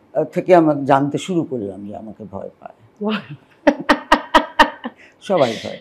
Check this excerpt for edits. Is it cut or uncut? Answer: uncut